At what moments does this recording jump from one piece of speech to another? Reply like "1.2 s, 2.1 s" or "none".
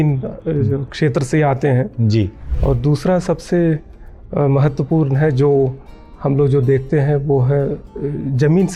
2.5 s

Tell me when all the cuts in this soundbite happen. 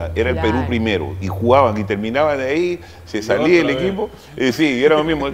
none

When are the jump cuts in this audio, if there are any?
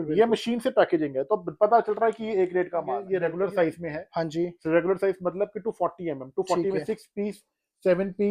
3.0 s

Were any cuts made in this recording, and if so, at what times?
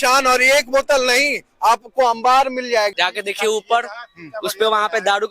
2.9 s

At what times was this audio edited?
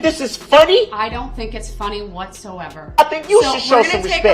3.0 s

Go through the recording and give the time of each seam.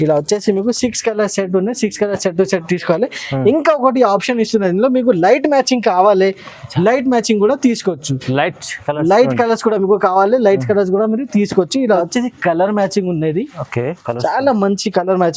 12.0 s

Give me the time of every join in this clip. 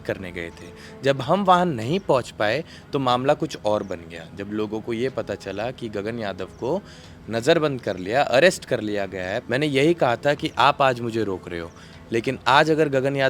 9.4 s

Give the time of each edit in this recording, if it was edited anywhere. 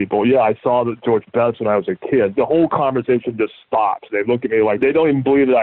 2.3 s, 4.8 s

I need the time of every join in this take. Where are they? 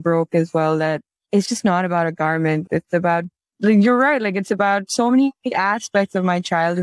none

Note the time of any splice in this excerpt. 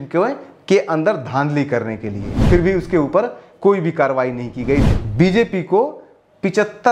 2.4 s, 4.8 s

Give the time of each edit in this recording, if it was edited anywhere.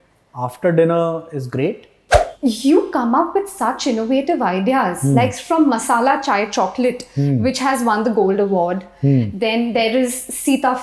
2.1 s

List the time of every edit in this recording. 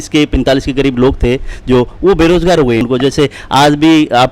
2.8 s

